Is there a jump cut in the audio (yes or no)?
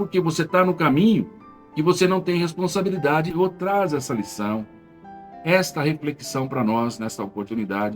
yes